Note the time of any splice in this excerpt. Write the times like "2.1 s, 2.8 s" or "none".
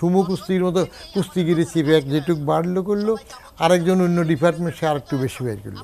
none